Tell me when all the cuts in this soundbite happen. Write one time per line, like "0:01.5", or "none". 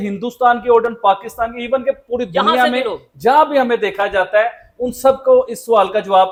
none

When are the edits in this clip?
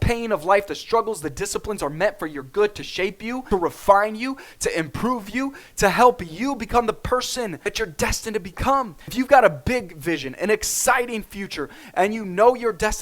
0:03.4
0:07.6
0:09.0

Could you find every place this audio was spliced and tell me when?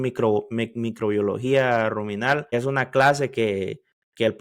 0:02.5

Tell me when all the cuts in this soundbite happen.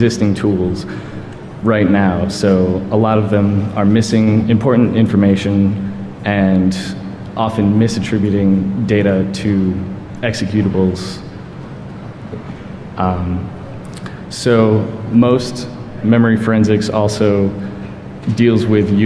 0:10.4

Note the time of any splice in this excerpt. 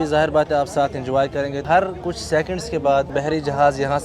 0:01.6
0:03.1

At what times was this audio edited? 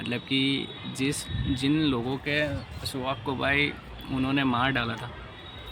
none

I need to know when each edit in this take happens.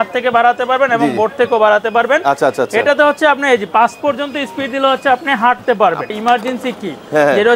0:06.1

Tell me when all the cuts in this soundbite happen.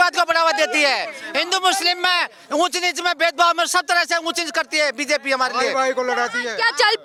none

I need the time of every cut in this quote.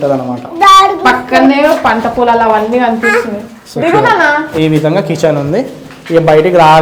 none

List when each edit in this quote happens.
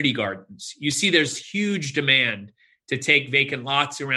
none

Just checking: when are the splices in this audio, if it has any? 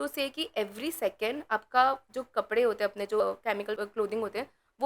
0:03.3

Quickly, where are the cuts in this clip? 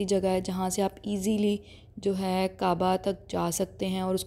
none

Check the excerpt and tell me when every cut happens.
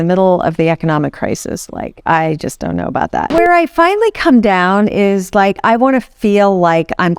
0:03.3

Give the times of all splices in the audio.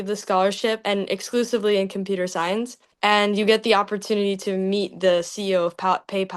none

